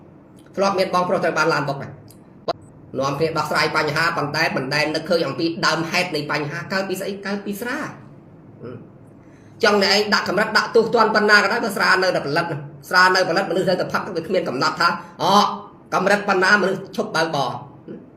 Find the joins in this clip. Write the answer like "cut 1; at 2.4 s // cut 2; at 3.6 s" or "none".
cut 1; at 2.5 s